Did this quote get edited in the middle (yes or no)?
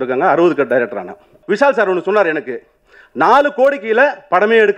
yes